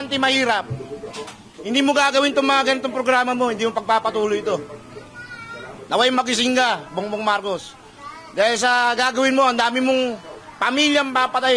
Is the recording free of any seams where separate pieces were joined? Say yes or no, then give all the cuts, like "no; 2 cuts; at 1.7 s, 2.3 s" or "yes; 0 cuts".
yes; 0 cuts